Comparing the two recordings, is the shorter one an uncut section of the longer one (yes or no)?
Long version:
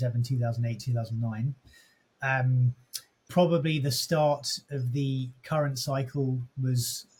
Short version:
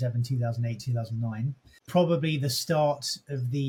no